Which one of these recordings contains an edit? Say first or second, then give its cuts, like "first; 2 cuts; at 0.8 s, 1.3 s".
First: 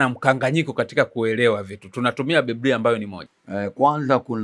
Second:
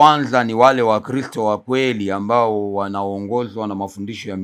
first; 1 cut; at 3.1 s